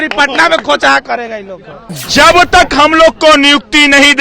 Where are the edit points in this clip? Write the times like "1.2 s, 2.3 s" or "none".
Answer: 2.0 s